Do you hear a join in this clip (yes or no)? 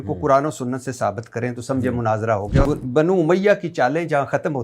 yes